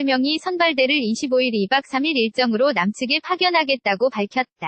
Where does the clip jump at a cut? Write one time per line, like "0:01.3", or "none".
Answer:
none